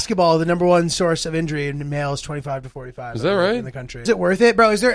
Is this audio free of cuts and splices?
no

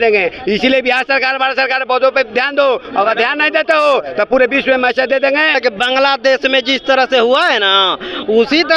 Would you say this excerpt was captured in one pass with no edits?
no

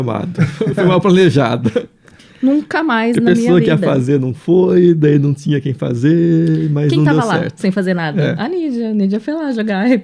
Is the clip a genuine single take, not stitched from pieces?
yes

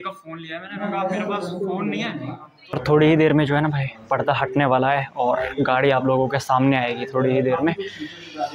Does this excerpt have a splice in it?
yes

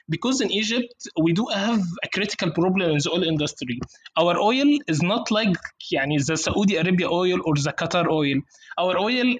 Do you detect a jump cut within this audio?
no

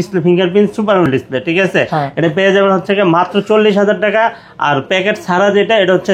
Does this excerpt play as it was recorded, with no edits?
yes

